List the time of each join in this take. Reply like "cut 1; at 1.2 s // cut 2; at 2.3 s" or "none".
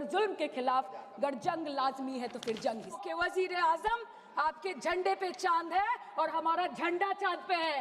cut 1; at 3.0 s